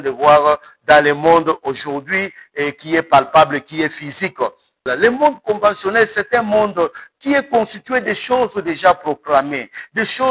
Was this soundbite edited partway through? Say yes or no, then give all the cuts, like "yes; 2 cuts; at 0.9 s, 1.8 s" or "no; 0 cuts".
yes; 1 cut; at 4.9 s